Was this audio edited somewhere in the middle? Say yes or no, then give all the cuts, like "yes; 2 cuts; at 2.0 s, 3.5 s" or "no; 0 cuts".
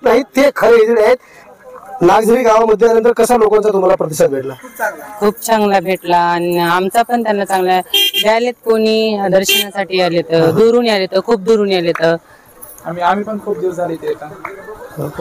no; 0 cuts